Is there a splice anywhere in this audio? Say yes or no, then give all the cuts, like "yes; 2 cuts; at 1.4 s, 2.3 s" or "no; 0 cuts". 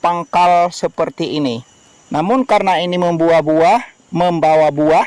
no; 0 cuts